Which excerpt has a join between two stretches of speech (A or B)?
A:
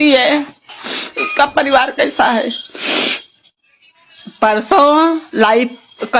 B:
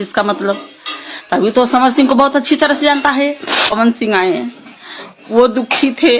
B